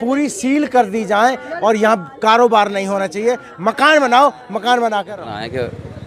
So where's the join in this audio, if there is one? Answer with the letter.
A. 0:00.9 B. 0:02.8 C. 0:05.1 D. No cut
C